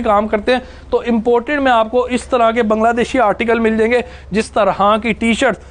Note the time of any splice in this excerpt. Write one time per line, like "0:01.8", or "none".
0:04.5